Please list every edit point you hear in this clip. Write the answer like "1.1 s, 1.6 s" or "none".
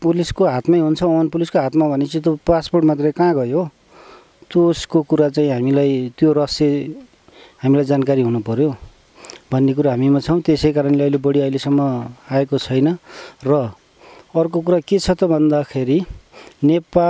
none